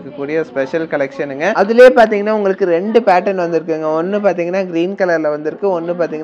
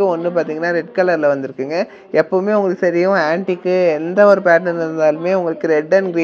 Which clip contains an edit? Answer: first; 1 cut; at 1.5 s

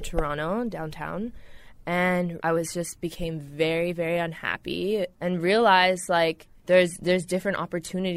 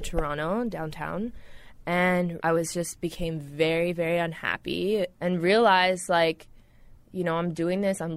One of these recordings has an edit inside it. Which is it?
first; 1 cut; at 6.5 s

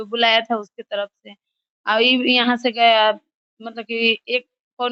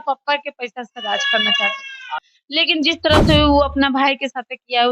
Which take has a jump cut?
second; 1 cut; at 2.3 s

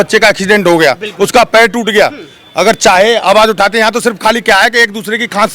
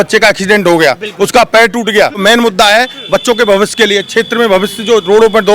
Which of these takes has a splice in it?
second; 1 cut; at 2.2 s

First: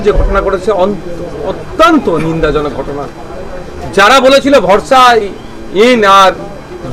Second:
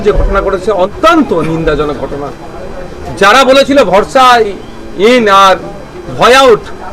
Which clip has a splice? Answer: second; 1 cut; at 0.9 s

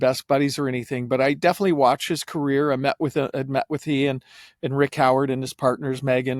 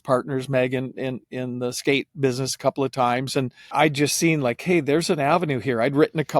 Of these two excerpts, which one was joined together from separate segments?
second; 1 cut; at 3.7 s

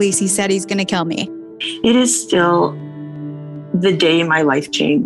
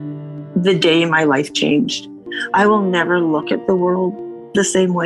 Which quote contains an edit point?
first; 1 cut; at 1.6 s

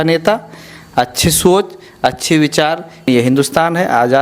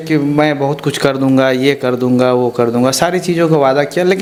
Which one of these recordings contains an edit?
first; 1 cut; at 3.0 s

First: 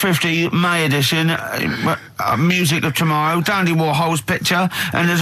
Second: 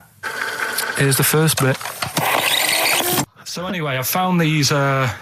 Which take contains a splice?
second; 1 cut; at 3.4 s

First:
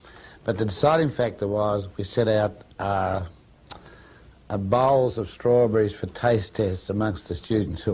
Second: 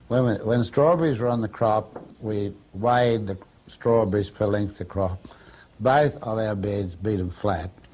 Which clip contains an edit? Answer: second; 1 cut; at 4.3 s

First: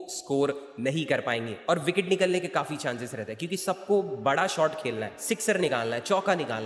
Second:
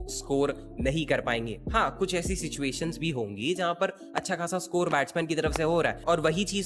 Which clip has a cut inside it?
first; 1 cut; at 1.6 s

